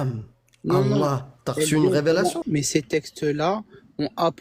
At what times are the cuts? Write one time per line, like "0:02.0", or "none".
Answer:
0:02.4